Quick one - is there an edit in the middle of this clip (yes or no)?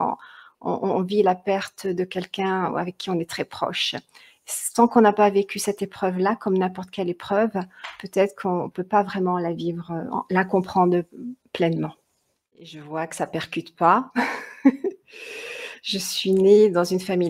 yes